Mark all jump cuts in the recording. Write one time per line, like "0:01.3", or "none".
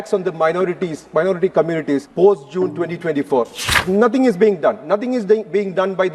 0:02.1
0:03.8